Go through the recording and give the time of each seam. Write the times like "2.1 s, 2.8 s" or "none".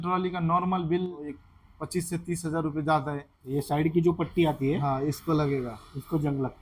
1.4 s, 3.5 s